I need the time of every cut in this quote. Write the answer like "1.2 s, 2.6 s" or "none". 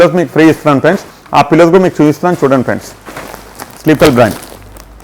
none

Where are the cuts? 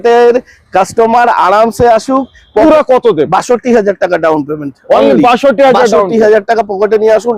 2.6 s

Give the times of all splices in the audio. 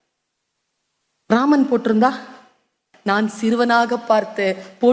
2.9 s

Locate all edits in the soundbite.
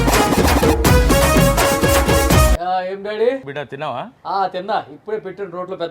2.5 s, 3.5 s

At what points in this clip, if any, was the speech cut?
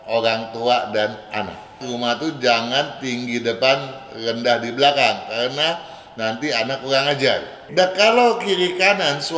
1.8 s, 7.6 s

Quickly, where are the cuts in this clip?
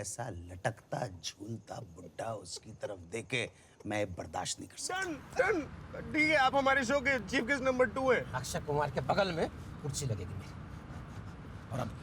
5.0 s

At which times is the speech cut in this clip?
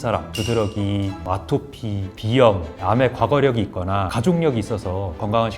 2.7 s

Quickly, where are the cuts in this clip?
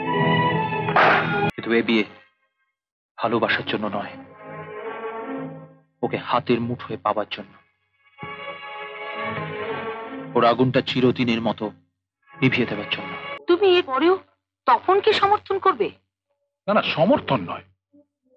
1.5 s, 13.3 s

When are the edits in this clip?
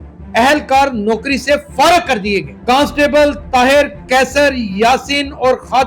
2.5 s

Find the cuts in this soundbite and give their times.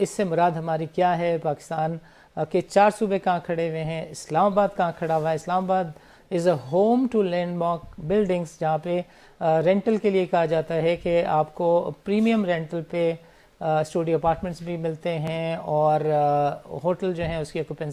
none

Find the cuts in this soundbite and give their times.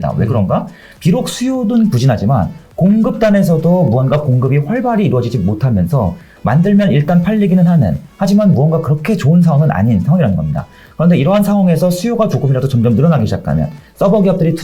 none

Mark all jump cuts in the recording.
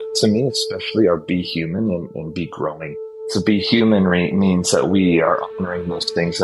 3.3 s

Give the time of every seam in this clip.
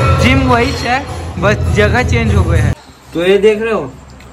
2.7 s

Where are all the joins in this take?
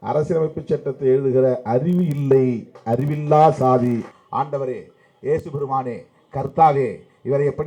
4.0 s

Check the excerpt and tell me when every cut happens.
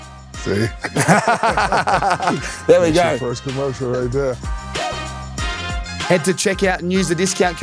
4.4 s, 6.1 s

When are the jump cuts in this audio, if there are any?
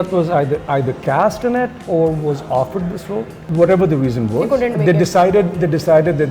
3.4 s

